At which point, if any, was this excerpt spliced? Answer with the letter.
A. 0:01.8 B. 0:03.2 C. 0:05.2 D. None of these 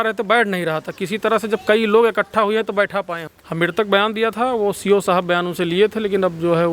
B